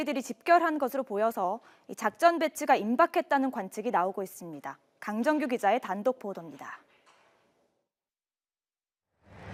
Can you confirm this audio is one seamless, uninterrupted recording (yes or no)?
yes